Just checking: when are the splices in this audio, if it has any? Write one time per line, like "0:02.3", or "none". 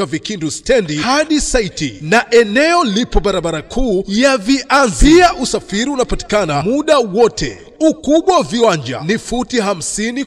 none